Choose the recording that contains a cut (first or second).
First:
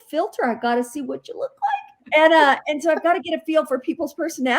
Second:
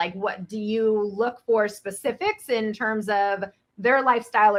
first